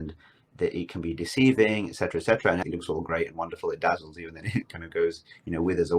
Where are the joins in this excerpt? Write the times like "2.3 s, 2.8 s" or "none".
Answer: 2.6 s